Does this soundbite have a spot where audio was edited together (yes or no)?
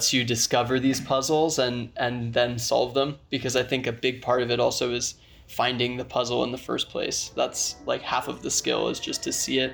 no